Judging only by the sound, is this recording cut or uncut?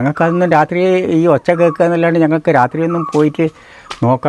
uncut